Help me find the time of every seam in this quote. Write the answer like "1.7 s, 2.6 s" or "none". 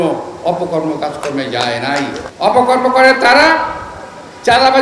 2.3 s